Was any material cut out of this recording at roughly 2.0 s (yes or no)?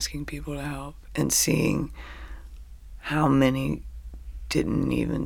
no